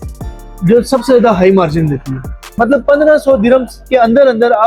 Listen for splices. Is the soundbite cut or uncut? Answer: cut